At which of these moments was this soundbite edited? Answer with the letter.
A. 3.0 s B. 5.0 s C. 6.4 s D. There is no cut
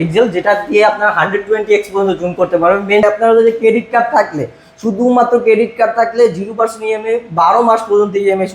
A